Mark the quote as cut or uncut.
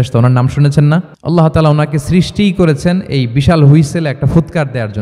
cut